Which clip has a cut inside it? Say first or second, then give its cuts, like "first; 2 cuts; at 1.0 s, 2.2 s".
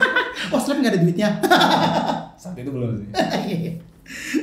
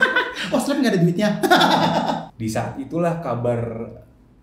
second; 1 cut; at 2.3 s